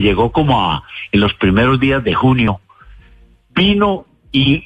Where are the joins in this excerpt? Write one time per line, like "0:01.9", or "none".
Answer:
0:02.5